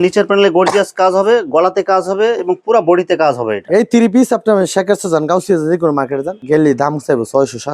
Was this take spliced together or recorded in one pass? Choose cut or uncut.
uncut